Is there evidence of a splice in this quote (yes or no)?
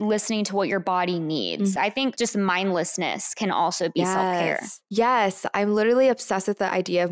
yes